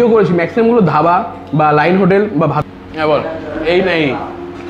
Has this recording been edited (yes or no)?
yes